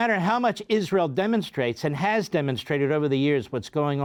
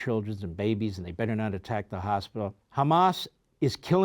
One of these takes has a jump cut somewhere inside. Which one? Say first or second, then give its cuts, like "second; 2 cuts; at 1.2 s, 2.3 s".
second; 1 cut; at 2.6 s